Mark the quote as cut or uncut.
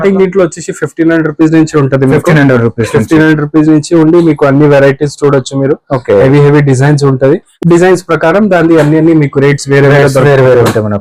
uncut